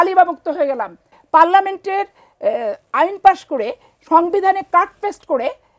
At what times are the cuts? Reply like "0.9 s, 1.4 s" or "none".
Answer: 1.1 s